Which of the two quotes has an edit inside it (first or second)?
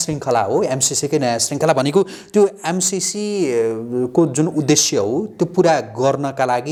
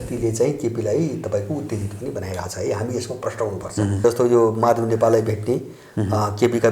second